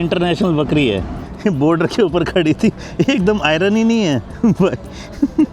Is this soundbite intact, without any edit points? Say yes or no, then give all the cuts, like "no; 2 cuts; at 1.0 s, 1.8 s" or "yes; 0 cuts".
no; 2 cuts; at 1.2 s, 4.3 s